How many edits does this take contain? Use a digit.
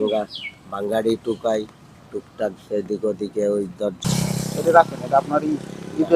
1